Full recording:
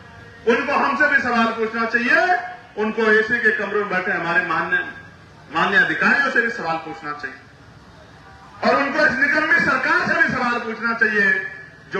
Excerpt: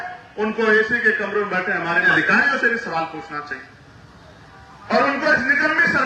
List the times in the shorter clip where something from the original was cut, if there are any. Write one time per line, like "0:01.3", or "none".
0:02.1